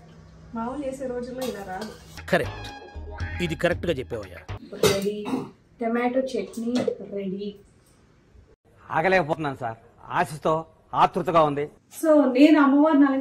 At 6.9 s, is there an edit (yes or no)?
no